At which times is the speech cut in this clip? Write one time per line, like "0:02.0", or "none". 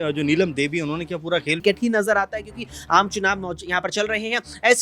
0:01.6